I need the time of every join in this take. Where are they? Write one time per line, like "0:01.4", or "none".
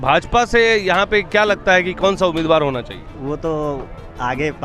0:03.0

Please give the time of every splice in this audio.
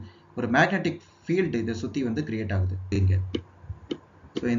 0:02.9

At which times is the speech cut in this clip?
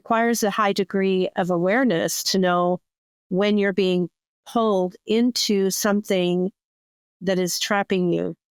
none

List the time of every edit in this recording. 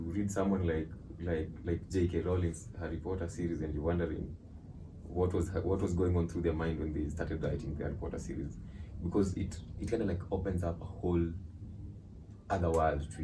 none

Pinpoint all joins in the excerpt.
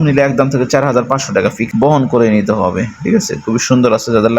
0:01.6

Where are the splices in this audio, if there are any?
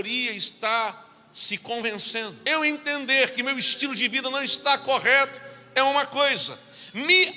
0:02.4

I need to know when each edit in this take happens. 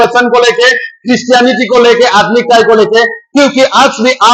none

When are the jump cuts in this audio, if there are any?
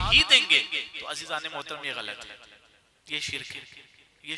none

